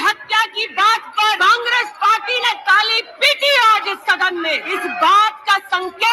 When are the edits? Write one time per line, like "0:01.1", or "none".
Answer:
0:01.2
0:04.7

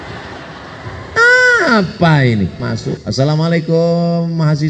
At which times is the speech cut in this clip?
0:02.7

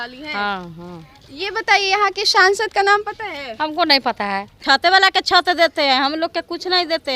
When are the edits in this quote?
0:04.6

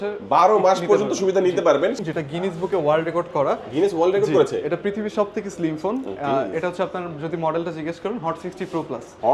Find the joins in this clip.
0:02.0

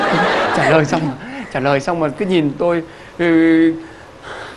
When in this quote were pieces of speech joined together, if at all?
none

